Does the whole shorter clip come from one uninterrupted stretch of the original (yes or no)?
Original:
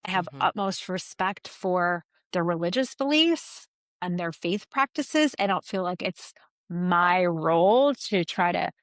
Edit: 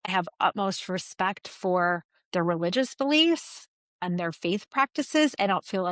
yes